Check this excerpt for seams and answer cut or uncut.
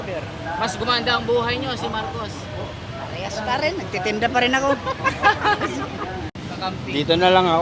cut